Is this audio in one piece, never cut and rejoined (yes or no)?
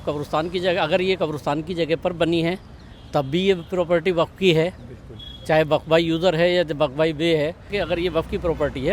no